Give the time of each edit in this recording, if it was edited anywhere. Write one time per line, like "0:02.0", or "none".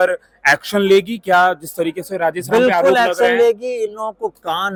none